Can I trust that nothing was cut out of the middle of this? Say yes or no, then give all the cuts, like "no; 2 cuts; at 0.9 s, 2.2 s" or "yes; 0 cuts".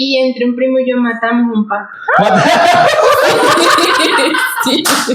yes; 0 cuts